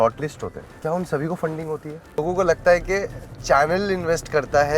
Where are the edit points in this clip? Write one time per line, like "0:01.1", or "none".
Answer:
0:02.2